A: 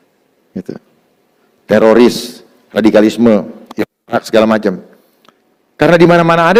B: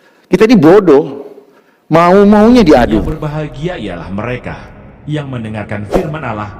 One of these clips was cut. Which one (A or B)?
B